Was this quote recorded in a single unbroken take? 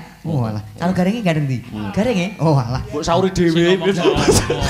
yes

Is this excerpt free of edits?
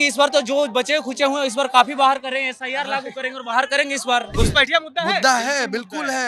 no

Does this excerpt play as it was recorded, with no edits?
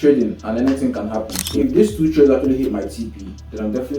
no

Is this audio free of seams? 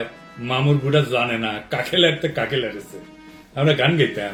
yes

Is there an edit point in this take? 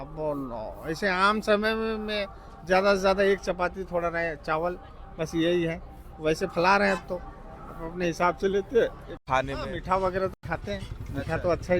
yes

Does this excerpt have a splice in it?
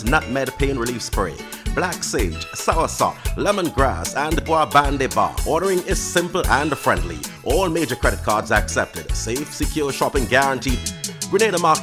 no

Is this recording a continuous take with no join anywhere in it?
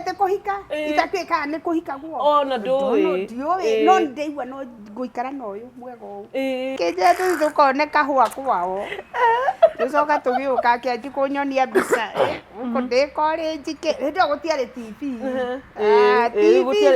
no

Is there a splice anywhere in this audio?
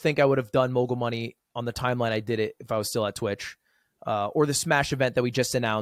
no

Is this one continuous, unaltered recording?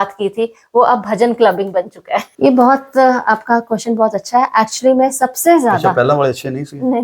no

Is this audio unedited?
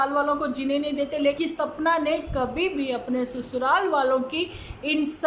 no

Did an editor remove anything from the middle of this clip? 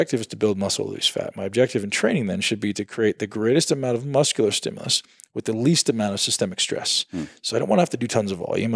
no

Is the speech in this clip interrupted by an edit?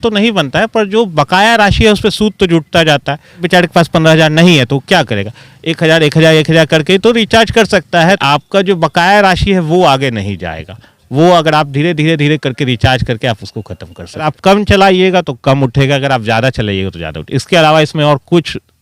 yes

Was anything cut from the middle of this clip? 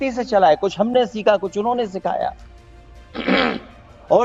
no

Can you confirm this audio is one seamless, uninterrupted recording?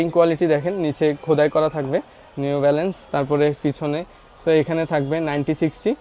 yes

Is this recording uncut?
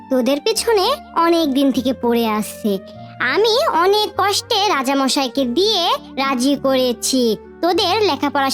yes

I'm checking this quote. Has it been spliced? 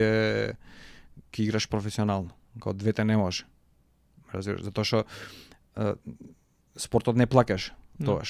no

